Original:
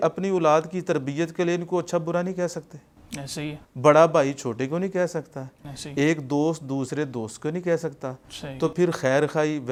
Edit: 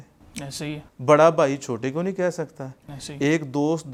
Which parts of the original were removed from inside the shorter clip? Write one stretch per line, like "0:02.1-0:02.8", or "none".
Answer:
none